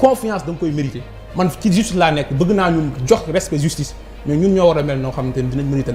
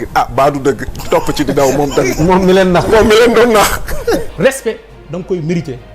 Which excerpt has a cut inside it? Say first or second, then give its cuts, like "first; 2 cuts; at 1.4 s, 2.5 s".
second; 1 cut; at 4.3 s